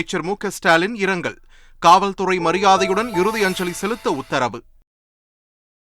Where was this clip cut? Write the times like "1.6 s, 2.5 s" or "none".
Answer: none